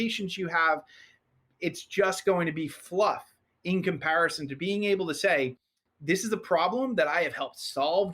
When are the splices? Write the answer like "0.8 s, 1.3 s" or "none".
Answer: 4.5 s